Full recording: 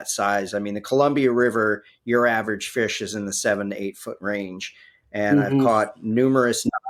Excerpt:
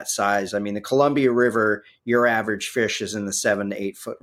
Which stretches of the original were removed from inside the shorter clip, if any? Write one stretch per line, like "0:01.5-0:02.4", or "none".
none